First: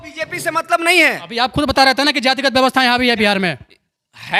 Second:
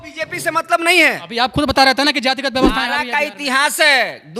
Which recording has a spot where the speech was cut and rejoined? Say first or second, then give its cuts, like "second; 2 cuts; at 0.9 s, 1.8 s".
second; 1 cut; at 2.6 s